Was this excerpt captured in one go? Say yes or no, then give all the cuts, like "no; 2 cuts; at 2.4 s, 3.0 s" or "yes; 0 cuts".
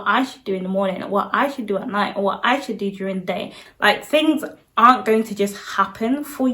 no; 1 cut; at 3.6 s